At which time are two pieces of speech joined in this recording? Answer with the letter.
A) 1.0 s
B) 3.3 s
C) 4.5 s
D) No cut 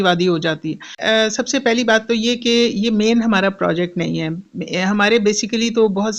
A